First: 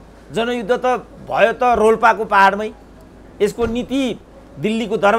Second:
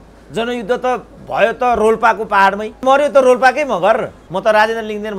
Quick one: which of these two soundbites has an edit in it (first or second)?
second